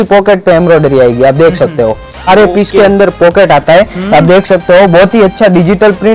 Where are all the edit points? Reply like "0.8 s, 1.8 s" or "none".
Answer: 2.2 s